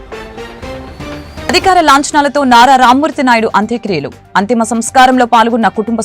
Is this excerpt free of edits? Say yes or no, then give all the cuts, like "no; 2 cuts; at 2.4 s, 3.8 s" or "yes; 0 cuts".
no; 1 cut; at 1.5 s